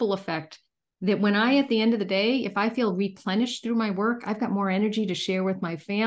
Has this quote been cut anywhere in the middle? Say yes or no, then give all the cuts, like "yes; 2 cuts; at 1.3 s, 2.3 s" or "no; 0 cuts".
no; 0 cuts